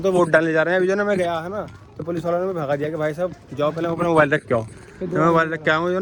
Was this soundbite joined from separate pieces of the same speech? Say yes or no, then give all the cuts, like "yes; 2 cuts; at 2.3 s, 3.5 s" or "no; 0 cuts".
no; 0 cuts